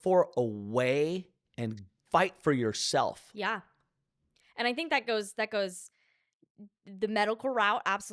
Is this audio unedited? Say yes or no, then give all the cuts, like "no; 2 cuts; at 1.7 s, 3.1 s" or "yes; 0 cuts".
no; 1 cut; at 2.0 s